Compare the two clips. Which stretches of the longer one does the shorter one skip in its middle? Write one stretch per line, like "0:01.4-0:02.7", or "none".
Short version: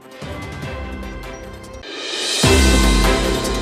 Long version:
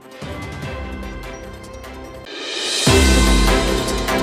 0:01.8-0:02.2